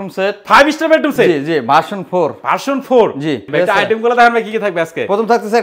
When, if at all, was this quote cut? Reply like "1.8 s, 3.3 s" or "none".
3.5 s